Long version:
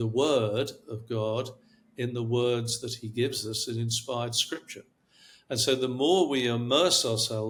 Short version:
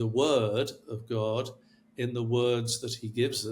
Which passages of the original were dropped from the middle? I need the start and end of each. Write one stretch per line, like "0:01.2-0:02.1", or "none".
none